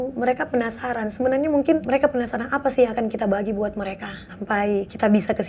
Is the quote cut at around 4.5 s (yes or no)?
yes